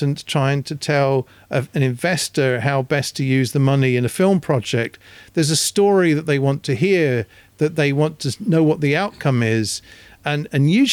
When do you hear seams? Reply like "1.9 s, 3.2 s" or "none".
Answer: none